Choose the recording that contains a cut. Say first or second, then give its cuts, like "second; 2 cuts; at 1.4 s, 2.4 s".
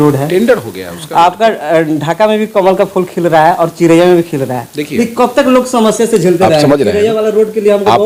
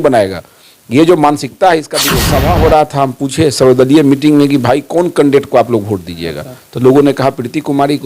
second; 1 cut; at 1.9 s